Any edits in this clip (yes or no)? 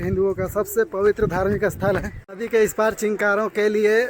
yes